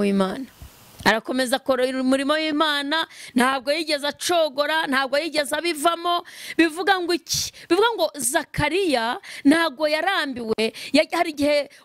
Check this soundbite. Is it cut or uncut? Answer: uncut